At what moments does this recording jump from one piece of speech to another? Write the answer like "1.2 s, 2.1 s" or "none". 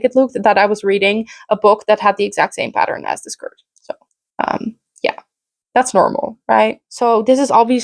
6.9 s